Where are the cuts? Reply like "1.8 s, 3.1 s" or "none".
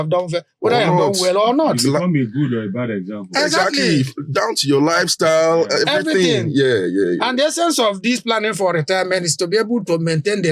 none